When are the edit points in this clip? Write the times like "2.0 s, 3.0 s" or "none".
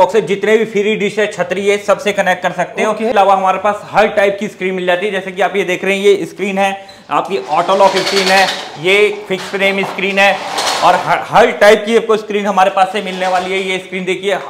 3.1 s